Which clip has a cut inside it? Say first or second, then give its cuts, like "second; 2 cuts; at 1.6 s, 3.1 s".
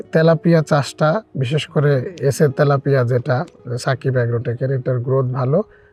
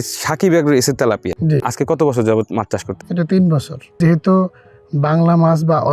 second; 1 cut; at 4.0 s